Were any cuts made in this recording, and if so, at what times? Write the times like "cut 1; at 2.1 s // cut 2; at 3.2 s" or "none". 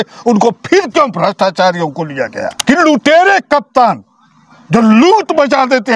cut 1; at 2.5 s